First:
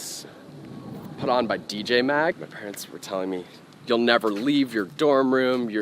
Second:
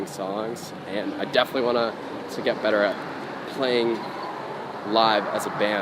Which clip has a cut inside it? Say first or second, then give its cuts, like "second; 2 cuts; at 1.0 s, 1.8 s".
first; 1 cut; at 2.4 s